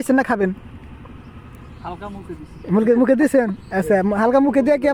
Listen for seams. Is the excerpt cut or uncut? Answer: uncut